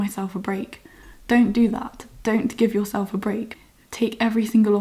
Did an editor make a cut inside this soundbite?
yes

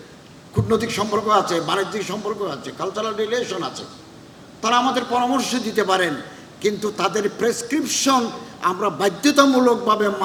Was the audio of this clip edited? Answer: no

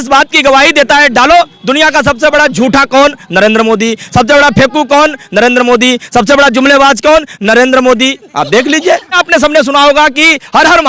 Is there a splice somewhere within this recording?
yes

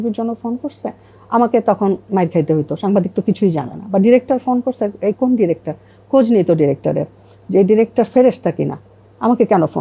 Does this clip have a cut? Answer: no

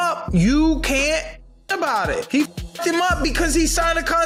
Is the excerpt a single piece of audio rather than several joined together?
yes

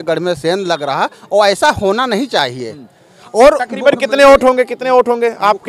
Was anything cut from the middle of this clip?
no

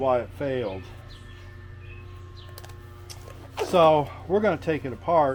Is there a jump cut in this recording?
no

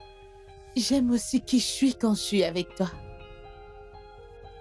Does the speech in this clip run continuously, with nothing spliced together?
no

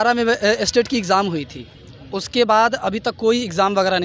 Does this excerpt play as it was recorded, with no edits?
yes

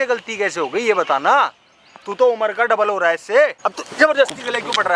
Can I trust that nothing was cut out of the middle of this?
no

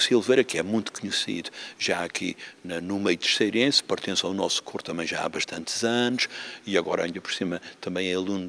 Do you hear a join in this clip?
no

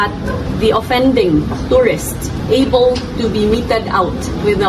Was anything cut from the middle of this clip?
yes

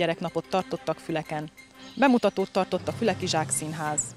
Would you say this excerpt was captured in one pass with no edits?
yes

